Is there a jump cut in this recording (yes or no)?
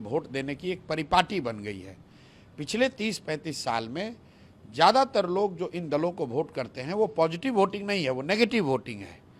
no